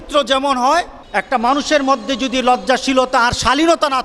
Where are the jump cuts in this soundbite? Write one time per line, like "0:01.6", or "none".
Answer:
0:01.0